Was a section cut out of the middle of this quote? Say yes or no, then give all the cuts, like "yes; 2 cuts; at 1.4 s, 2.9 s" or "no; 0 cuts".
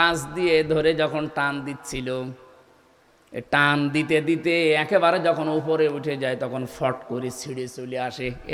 no; 0 cuts